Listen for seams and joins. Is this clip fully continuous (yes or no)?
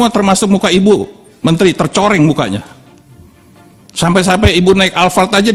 yes